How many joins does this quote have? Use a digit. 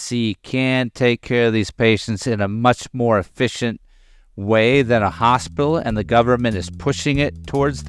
0